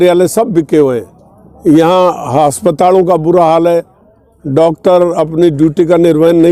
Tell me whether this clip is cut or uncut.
uncut